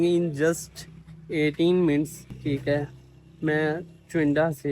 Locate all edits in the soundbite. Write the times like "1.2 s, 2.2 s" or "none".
2.2 s